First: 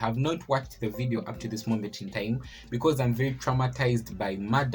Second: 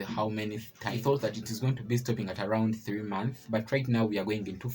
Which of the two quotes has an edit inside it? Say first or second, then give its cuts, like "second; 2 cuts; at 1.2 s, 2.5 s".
second; 1 cut; at 1.0 s